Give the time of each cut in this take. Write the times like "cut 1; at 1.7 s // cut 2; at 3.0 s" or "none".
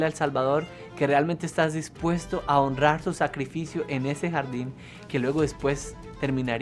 none